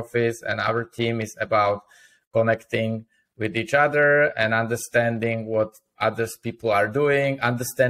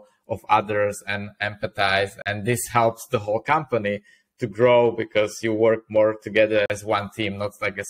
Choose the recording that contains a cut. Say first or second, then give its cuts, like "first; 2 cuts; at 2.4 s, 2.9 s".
second; 2 cuts; at 2.2 s, 6.7 s